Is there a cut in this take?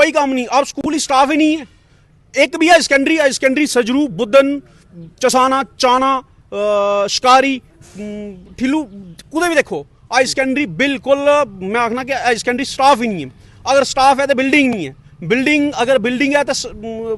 no; 0 cuts

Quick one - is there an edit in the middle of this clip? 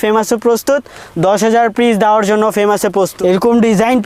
yes; 1 cut; at 3.1 s

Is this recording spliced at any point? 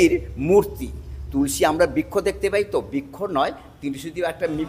no; 0 cuts

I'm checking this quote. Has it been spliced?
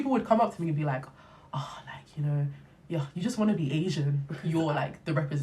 yes; 1 cut; at 4.3 s

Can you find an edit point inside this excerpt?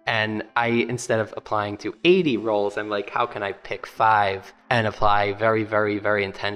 yes; 1 cut; at 4.5 s

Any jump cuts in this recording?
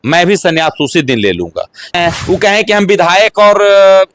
yes; 1 cut; at 1.9 s

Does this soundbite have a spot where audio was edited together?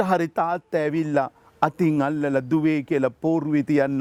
no; 0 cuts

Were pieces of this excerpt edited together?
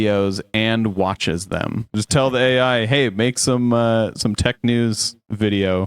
yes; 1 cut; at 1.8 s

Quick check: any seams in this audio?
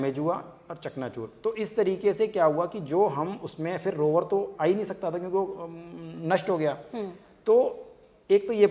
no; 0 cuts

